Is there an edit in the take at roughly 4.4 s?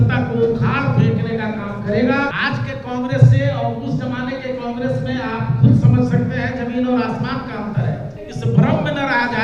no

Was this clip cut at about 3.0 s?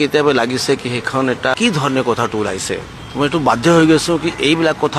yes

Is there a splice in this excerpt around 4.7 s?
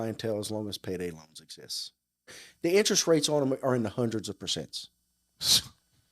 no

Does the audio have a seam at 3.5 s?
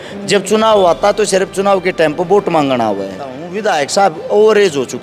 yes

